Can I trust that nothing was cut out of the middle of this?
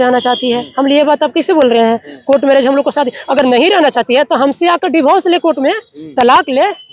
yes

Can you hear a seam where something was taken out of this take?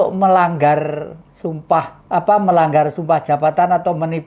yes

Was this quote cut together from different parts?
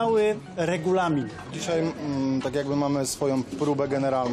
yes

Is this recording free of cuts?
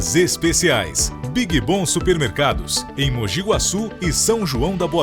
yes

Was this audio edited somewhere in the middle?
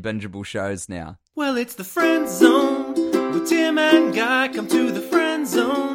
no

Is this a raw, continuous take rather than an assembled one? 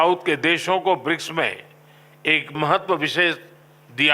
no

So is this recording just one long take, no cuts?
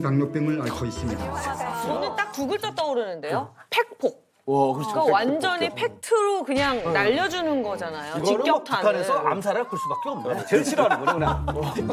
no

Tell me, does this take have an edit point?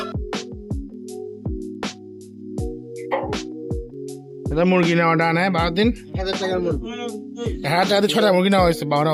no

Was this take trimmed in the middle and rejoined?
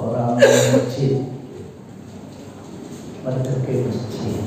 no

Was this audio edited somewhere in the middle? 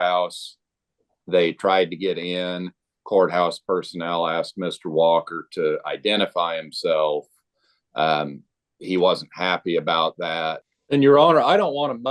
yes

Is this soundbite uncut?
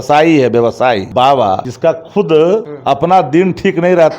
no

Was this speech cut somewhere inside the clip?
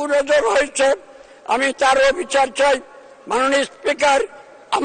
no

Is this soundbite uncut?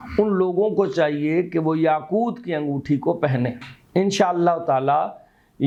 yes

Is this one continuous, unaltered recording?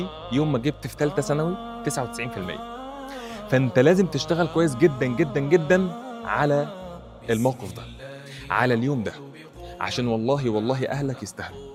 yes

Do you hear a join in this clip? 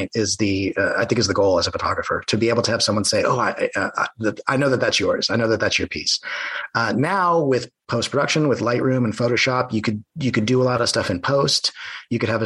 no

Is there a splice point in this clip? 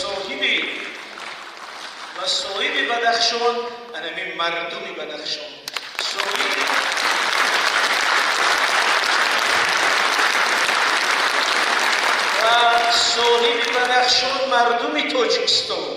no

